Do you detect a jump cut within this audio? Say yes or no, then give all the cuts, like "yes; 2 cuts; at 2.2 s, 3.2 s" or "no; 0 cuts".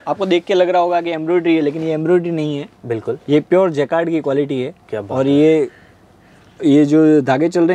no; 0 cuts